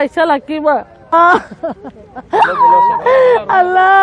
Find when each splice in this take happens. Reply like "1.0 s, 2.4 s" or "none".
1.1 s